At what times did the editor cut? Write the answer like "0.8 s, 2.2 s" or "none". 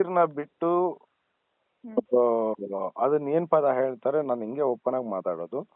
none